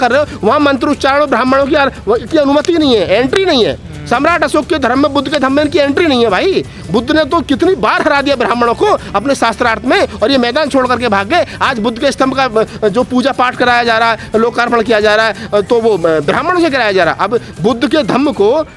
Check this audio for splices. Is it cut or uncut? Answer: uncut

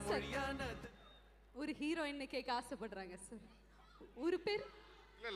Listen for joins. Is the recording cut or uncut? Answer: uncut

